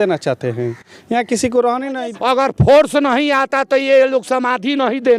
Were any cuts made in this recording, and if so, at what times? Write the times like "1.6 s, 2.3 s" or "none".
2.0 s